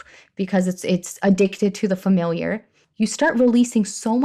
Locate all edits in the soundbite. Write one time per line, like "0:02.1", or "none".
0:02.8